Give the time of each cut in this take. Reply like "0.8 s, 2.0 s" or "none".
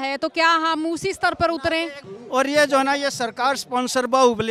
2.0 s

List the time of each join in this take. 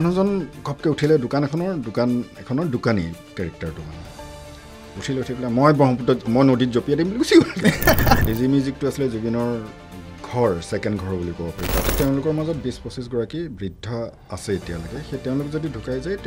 8.2 s, 11.9 s

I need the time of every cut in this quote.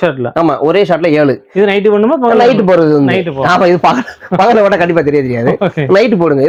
none

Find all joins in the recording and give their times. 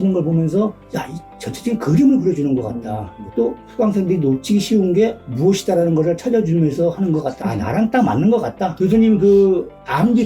3.6 s, 7.3 s, 8.8 s

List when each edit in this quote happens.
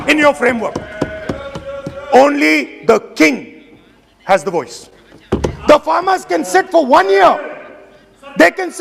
none

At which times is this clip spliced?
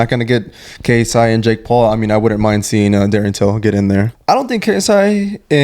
4.1 s

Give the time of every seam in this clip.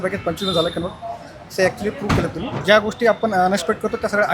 2.5 s

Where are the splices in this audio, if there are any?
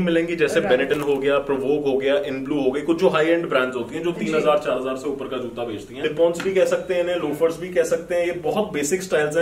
6.0 s

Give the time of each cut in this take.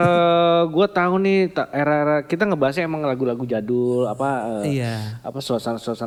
none

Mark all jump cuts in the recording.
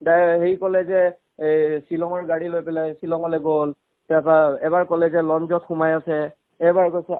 none

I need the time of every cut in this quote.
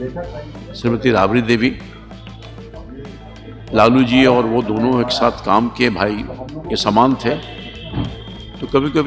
none

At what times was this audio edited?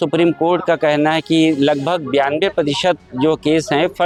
none

